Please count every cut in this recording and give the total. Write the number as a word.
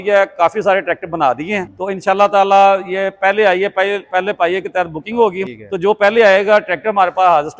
two